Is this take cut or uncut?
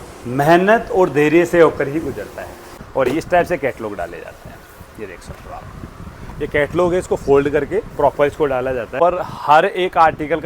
cut